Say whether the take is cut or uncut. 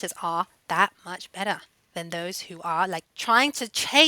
cut